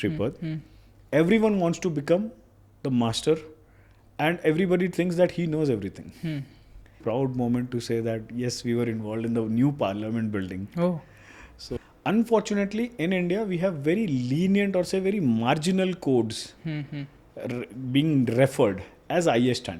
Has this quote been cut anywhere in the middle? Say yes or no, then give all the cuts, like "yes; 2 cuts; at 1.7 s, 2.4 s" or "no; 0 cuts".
yes; 2 cuts; at 7.0 s, 11.8 s